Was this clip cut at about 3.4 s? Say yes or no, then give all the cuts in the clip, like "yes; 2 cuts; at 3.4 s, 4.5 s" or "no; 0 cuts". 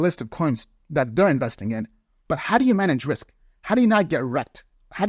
no; 0 cuts